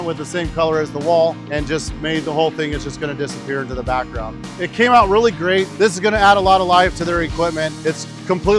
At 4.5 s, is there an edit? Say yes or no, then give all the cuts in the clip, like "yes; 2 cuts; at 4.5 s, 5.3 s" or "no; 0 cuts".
yes; 3 cuts; at 4.5 s, 5.7 s, 7.7 s